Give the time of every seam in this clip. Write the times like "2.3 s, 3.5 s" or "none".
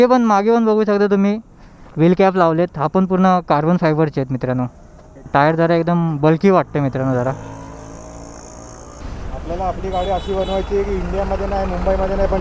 5.3 s, 9.0 s

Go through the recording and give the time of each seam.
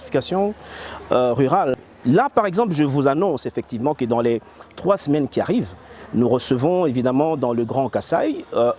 1.8 s

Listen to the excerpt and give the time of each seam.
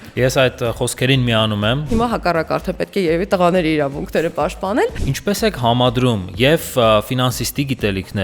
1.9 s, 5.1 s

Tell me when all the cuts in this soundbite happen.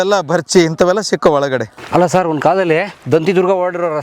1.7 s, 3.0 s

